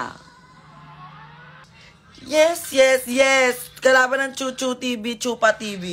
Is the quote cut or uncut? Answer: cut